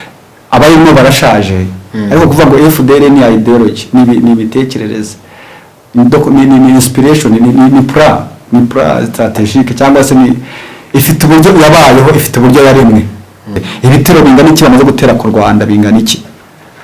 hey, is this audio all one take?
no; 1 cut; at 13.7 s

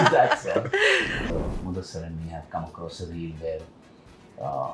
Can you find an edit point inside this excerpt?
yes; 1 cut; at 1.2 s

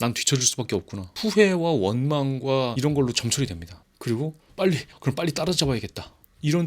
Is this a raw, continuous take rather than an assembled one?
no; 1 cut; at 4.9 s

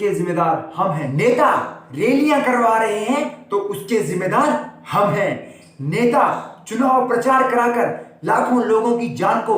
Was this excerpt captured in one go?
no; 1 cut; at 1.1 s

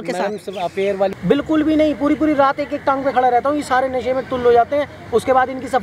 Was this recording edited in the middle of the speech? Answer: yes; 1 cut; at 1.1 s

